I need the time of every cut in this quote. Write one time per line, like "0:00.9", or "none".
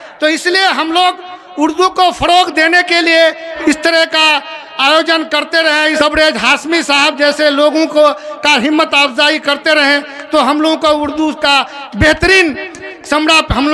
0:03.5
0:05.9